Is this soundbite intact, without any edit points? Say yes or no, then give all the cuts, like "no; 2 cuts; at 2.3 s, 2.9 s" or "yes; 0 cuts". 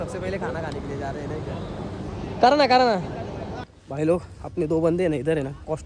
yes; 0 cuts